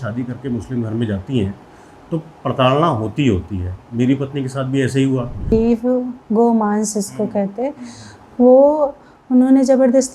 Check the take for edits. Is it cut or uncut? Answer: cut